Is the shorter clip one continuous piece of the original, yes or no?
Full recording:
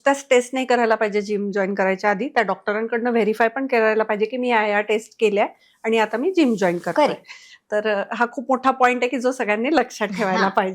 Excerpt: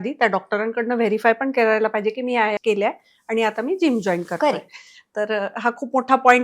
no